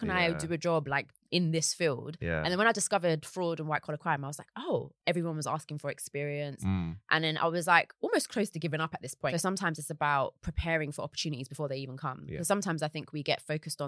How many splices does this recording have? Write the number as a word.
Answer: two